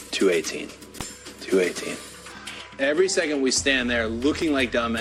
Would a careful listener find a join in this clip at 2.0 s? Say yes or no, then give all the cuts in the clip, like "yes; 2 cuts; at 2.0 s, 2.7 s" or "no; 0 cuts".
no; 0 cuts